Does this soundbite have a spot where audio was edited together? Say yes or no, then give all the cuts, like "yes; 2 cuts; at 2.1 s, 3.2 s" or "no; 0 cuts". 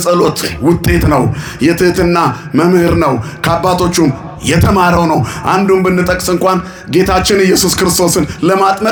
no; 0 cuts